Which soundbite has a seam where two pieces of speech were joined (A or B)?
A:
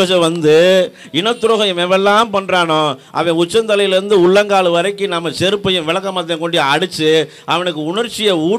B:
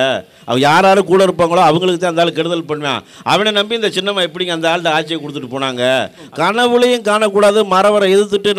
B